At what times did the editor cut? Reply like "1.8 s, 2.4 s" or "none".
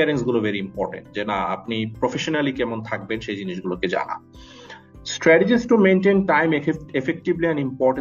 none